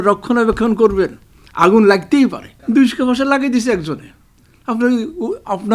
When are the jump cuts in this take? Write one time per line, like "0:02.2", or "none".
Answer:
0:02.6